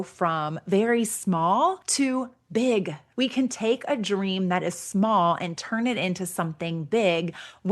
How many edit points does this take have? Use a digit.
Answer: 2